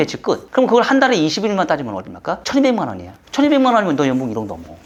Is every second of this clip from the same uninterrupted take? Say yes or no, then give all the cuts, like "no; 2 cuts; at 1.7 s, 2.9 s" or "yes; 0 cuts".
yes; 0 cuts